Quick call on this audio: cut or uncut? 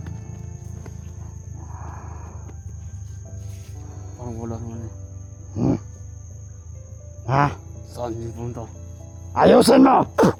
uncut